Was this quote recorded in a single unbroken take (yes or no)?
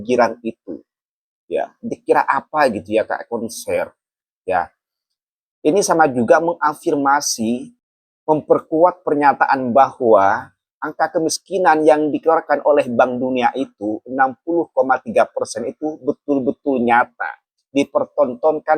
no